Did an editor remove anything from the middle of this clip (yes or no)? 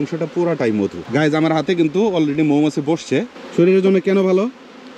yes